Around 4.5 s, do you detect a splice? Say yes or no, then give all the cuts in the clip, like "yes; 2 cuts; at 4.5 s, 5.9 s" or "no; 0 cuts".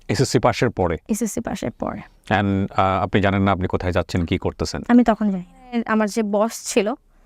no; 1 cut; at 5.8 s